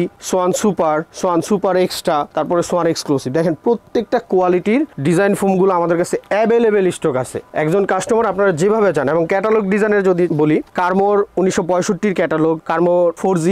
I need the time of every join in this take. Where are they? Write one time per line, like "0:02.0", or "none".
none